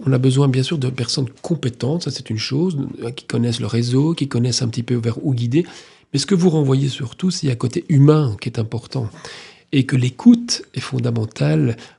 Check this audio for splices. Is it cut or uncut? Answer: uncut